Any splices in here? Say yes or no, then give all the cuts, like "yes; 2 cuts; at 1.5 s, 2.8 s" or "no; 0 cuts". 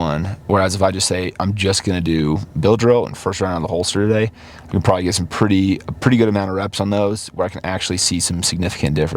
no; 0 cuts